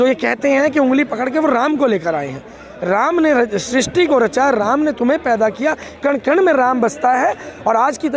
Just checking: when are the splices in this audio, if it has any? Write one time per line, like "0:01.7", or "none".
none